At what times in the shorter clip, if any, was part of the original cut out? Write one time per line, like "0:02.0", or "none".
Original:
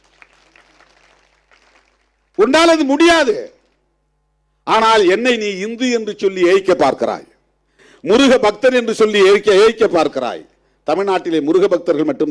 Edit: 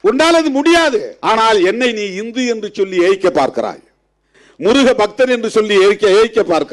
0:01.1